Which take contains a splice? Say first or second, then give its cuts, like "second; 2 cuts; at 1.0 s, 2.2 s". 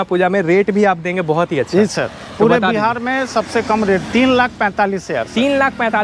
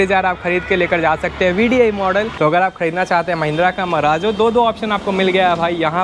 second; 1 cut; at 2.3 s